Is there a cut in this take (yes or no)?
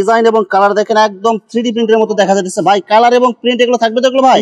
no